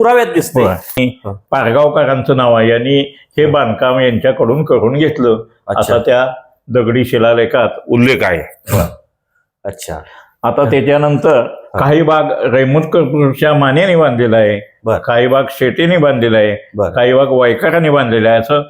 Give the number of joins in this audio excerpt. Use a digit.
1